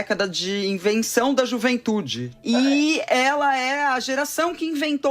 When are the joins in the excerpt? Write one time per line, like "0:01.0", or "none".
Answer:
0:02.2